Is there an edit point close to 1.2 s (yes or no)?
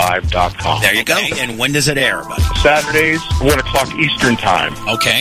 yes